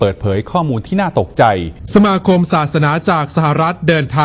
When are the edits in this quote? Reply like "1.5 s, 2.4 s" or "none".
1.8 s